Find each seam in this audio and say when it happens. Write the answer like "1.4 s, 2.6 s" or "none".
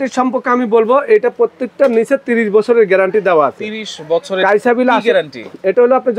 none